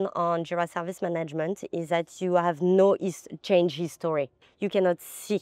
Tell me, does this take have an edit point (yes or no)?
yes